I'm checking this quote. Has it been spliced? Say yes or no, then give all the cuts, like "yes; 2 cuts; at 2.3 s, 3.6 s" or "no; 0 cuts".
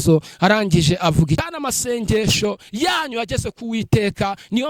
yes; 1 cut; at 1.4 s